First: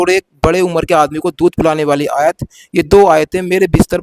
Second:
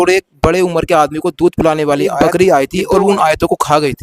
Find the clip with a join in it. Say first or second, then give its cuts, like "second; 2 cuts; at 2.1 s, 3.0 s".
second; 1 cut; at 2.1 s